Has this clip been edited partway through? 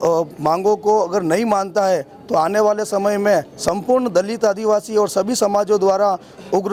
no; 0 cuts

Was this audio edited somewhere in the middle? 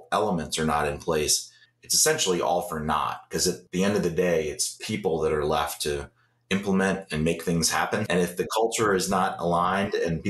yes; 2 cuts; at 3.6 s, 8.1 s

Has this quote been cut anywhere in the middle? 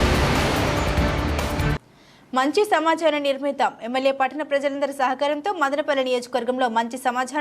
yes; 1 cut; at 1.8 s

